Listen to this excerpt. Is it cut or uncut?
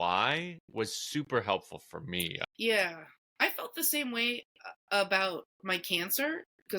cut